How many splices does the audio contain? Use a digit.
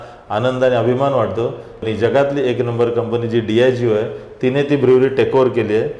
1